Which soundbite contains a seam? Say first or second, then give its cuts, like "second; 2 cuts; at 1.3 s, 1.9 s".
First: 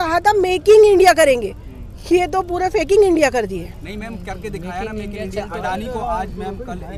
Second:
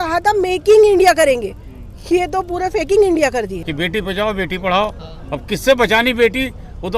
second; 1 cut; at 3.6 s